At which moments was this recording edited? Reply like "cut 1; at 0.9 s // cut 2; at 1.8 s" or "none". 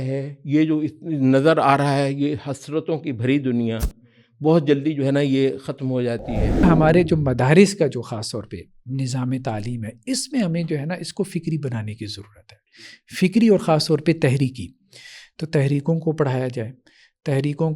cut 1; at 6.6 s